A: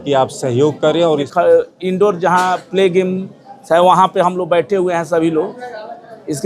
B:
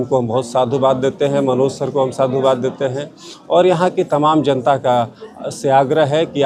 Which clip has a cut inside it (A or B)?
A